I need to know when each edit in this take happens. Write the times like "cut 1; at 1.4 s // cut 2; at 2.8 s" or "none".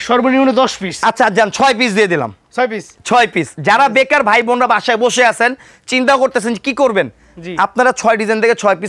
none